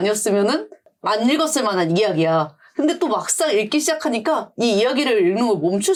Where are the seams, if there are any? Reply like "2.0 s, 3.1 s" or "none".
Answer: none